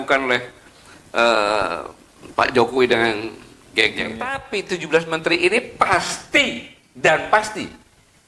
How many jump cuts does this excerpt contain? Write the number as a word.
one